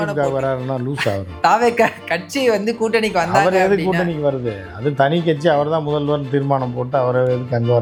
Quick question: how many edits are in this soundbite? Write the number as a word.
zero